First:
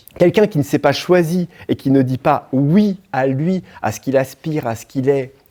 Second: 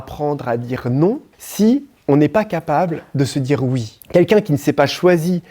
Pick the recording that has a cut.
second; 1 cut; at 1.9 s

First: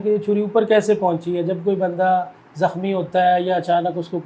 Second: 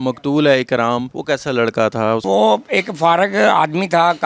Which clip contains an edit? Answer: second; 2 cuts; at 1.1 s, 2.2 s

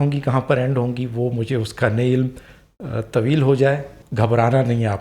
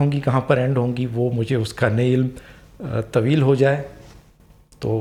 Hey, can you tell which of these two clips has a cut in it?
first; 1 cut; at 4.0 s

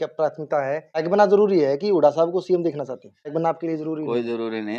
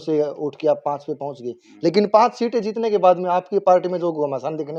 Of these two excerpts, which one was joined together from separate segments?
first; 2 cuts; at 1.1 s, 3.3 s

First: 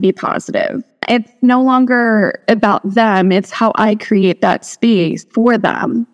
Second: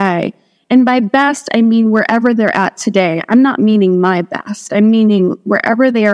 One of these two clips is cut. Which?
first; 3 cuts; at 1.0 s, 2.4 s, 5.2 s

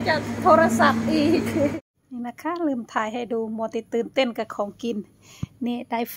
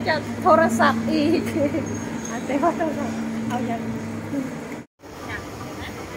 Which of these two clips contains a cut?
first; 1 cut; at 1.8 s

